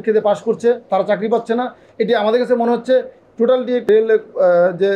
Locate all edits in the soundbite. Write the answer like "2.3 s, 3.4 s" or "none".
3.9 s